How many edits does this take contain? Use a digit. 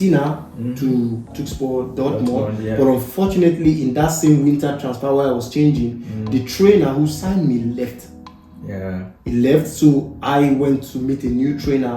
1